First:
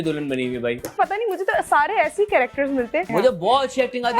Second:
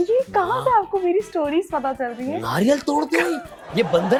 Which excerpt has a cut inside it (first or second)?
first